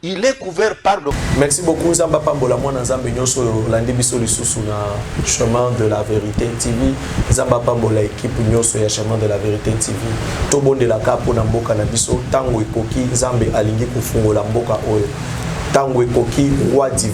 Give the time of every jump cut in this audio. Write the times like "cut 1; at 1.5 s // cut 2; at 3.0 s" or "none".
cut 1; at 1.1 s